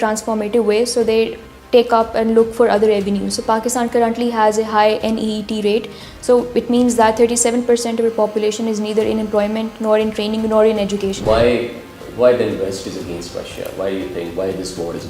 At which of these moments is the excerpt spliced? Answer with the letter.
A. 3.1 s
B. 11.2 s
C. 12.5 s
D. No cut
B